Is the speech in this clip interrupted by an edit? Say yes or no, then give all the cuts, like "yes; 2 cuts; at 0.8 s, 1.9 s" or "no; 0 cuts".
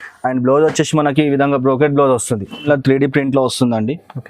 yes; 1 cut; at 2.6 s